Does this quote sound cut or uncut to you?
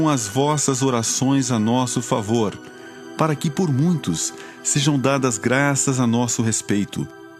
uncut